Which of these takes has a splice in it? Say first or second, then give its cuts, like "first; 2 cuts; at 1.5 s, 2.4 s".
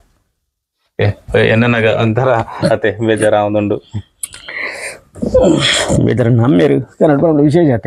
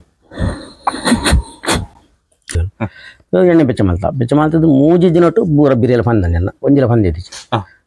second; 1 cut; at 2.7 s